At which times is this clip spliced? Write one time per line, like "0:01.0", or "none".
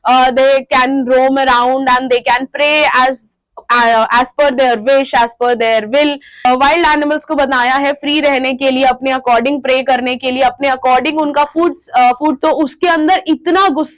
0:06.4
0:12.4